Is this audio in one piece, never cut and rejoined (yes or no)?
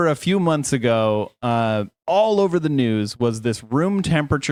yes